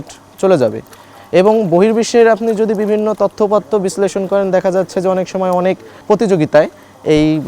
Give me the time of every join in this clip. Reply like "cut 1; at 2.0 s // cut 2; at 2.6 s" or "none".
cut 1; at 6.0 s